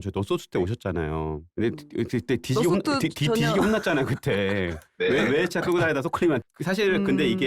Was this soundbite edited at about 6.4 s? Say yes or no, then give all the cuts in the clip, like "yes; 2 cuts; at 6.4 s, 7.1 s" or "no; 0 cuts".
yes; 2 cuts; at 1.5 s, 6.4 s